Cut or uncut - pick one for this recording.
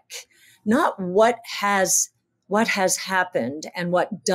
uncut